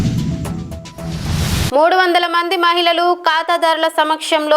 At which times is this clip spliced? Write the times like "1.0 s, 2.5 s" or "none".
1.7 s